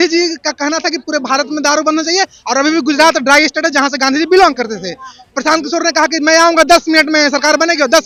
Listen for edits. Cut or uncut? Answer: uncut